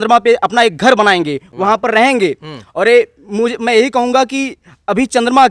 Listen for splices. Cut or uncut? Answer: uncut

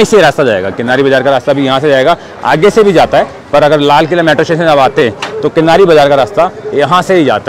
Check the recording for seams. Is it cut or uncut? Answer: uncut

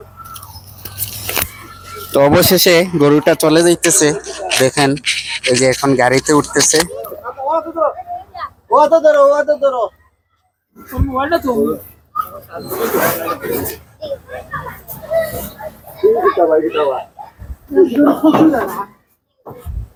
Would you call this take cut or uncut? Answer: uncut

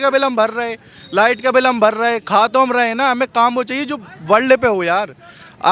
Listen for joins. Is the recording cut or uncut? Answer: uncut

